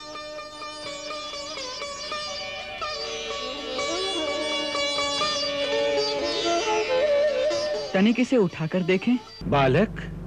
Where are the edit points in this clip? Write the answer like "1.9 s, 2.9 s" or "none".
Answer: 7.8 s, 9.3 s